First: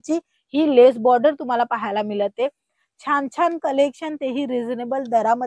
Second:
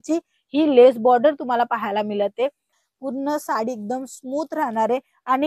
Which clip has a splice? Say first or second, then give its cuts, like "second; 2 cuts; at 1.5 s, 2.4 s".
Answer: second; 1 cut; at 2.9 s